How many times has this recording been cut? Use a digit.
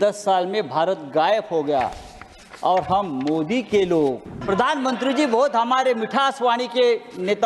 1